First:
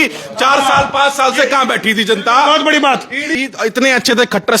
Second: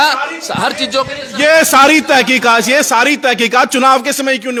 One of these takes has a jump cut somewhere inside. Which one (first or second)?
first